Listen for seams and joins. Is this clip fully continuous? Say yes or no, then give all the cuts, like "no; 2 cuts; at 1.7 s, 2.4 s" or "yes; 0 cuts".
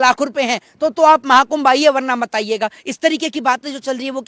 yes; 0 cuts